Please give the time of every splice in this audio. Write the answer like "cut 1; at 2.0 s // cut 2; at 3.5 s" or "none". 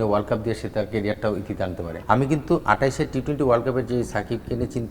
cut 1; at 1.9 s